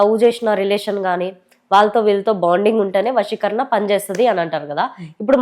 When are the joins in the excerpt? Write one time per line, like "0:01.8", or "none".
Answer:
none

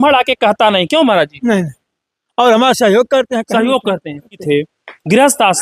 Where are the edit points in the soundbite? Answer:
0:04.4

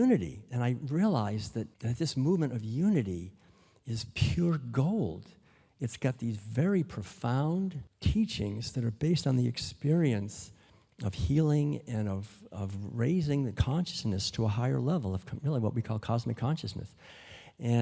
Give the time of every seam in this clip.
0:01.8

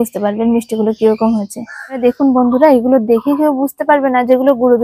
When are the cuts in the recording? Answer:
0:02.0

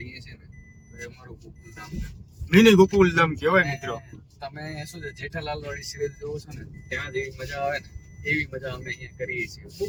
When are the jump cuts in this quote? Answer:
none

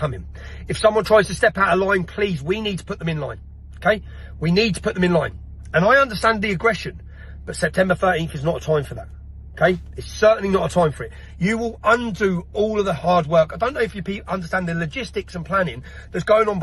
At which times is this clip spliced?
none

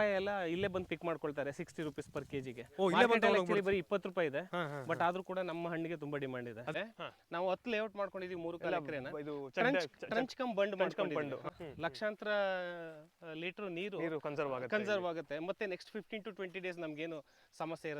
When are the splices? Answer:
0:06.7
0:11.5

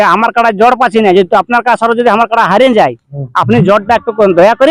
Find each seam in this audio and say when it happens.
none

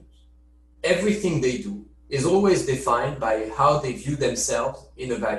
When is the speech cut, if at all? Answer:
none

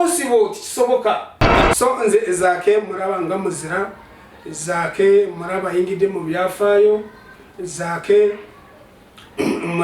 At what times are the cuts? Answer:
0:01.4

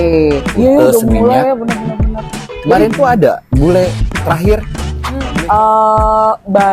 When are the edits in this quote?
0:05.2

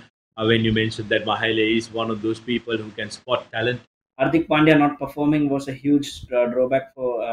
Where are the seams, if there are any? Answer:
0:04.0

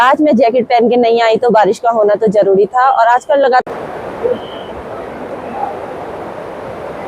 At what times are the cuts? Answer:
0:03.7

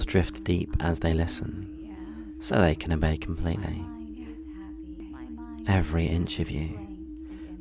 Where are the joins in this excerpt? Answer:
0:05.0

